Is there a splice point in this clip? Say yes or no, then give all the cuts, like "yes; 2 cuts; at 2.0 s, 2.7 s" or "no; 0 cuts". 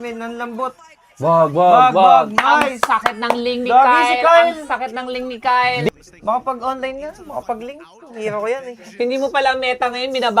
yes; 1 cut; at 5.9 s